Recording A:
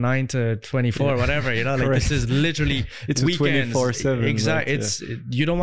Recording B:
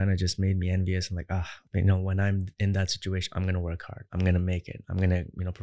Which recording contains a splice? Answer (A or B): B